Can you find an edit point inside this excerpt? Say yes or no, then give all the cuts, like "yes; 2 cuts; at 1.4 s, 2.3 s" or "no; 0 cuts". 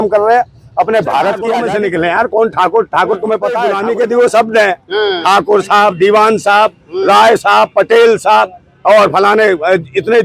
yes; 2 cuts; at 1.5 s, 3.7 s